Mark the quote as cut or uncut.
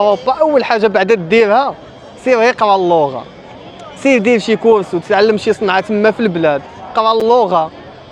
uncut